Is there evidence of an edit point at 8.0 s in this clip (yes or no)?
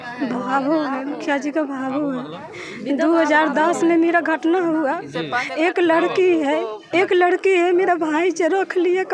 no